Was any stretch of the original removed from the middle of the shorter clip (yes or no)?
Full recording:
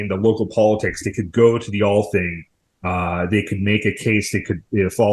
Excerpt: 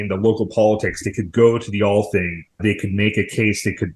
yes